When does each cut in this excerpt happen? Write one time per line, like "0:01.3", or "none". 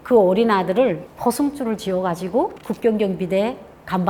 none